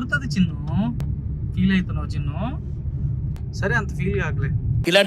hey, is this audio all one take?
no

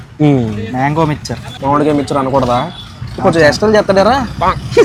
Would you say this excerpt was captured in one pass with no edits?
yes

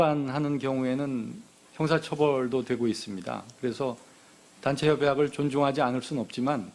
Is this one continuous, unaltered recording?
yes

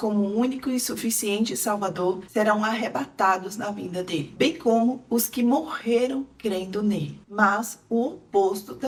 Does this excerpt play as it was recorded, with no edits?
yes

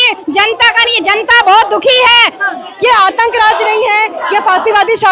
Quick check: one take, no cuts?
no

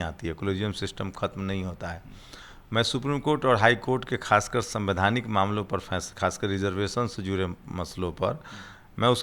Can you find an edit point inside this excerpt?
no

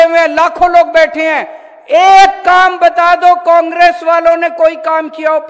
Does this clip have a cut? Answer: no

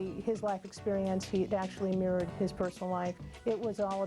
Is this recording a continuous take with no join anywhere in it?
no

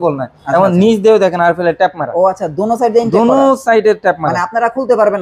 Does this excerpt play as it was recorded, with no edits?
yes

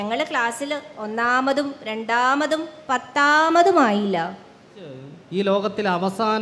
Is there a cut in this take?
yes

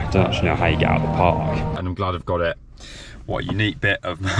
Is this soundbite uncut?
no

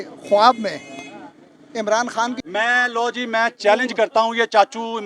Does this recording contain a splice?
yes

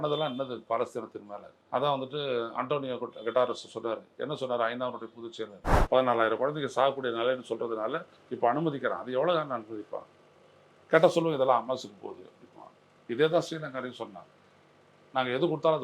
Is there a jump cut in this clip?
yes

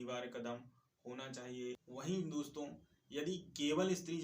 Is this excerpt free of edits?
no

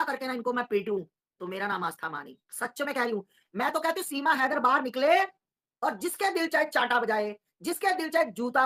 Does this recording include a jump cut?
yes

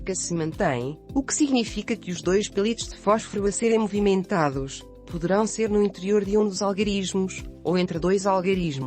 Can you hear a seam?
yes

